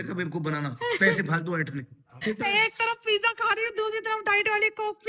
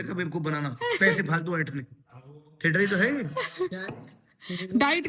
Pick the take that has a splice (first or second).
first